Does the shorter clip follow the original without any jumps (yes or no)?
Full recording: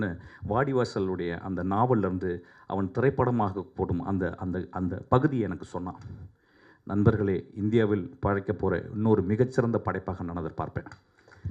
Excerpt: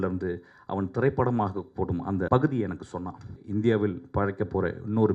no